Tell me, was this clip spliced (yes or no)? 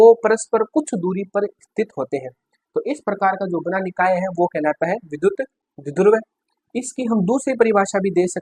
no